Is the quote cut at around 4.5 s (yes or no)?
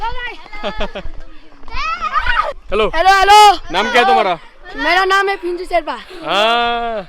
no